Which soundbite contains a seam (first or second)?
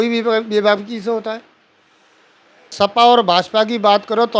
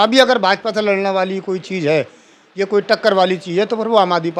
first